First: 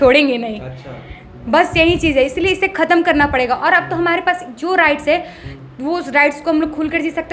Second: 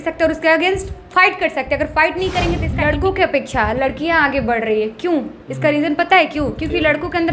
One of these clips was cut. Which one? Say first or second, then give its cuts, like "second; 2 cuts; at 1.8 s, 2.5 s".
second; 1 cut; at 2.7 s